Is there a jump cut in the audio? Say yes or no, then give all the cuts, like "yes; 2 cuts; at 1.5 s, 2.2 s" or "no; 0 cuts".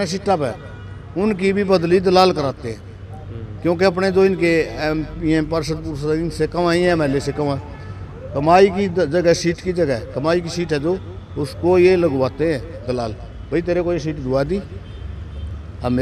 no; 0 cuts